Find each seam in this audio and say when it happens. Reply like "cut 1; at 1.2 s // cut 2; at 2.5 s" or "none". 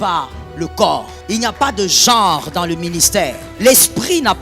cut 1; at 1.1 s // cut 2; at 3.4 s